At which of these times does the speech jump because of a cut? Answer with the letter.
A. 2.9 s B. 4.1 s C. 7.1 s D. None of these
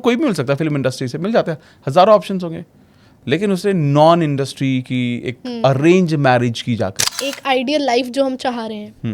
C